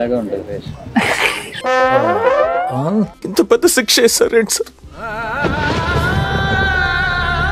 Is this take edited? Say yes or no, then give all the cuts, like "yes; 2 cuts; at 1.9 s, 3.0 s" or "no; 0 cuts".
no; 0 cuts